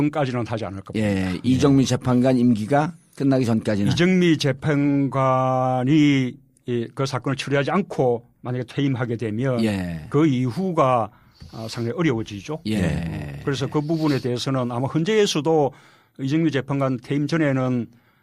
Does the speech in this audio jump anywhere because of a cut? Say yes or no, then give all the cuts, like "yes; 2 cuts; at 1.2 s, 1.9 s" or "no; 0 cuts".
no; 0 cuts